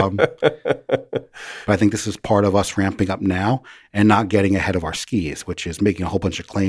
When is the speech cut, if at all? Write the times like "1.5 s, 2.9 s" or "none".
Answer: 1.5 s